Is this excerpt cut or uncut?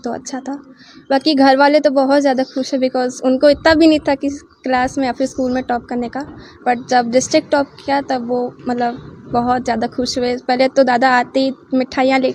uncut